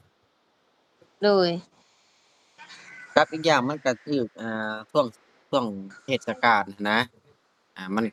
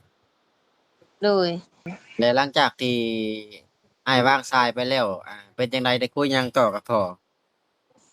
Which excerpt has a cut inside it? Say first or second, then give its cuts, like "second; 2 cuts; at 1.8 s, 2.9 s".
second; 1 cut; at 2.0 s